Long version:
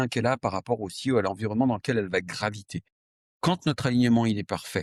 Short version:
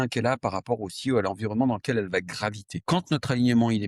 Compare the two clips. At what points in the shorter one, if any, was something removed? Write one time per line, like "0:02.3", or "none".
0:02.7